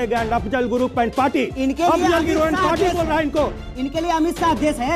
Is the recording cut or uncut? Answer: uncut